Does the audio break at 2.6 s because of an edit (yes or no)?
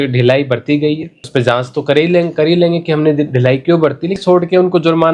no